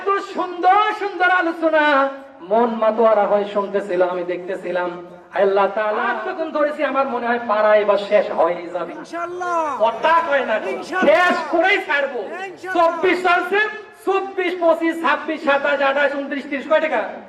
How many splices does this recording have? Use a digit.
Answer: 1